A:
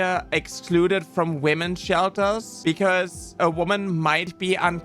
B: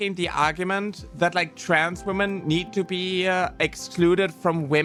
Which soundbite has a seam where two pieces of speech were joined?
A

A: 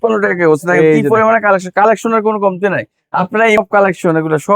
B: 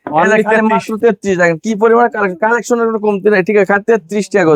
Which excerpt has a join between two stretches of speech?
A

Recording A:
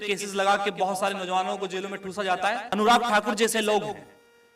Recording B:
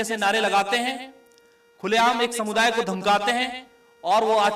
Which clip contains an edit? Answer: A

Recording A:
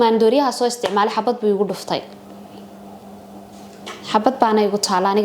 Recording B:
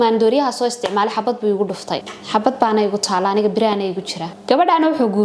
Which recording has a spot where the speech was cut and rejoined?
B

